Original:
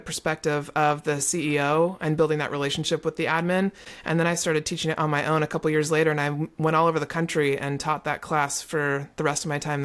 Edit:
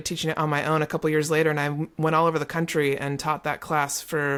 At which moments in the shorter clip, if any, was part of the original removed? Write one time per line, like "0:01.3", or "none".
none